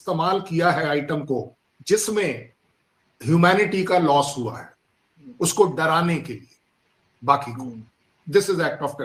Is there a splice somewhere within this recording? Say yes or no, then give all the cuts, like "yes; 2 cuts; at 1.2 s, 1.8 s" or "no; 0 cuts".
no; 0 cuts